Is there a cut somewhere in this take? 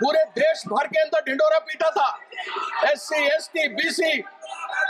no; 0 cuts

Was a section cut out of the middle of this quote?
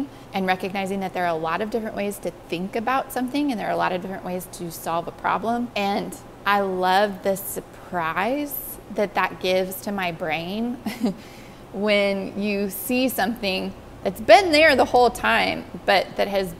no; 0 cuts

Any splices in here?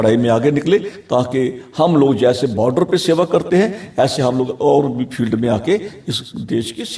no; 0 cuts

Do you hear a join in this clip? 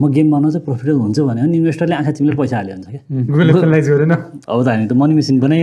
yes; 2 cuts; at 3.3 s, 4.3 s

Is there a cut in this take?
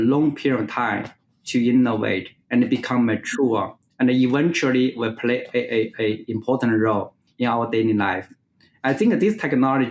no; 0 cuts

